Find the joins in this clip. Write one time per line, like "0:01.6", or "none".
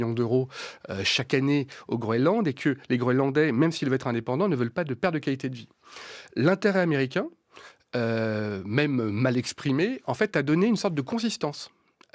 none